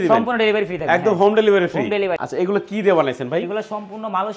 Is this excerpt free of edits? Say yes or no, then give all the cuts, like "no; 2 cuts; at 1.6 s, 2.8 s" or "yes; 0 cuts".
no; 1 cut; at 2.2 s